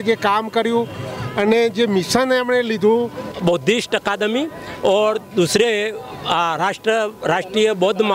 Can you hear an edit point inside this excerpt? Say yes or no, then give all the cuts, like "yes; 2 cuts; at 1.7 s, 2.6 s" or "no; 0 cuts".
yes; 1 cut; at 3.3 s